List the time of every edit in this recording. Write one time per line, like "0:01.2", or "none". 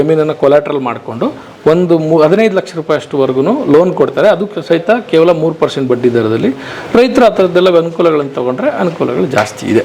none